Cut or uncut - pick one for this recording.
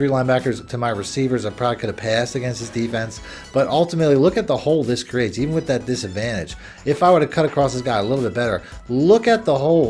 uncut